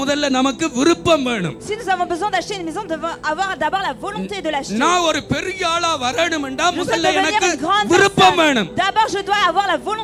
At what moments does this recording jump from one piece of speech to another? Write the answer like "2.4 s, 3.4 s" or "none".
none